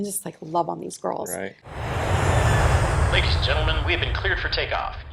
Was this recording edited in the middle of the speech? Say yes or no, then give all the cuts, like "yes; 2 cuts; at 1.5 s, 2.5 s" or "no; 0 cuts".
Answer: yes; 1 cut; at 1.6 s